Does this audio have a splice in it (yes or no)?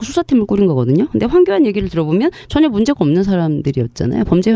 no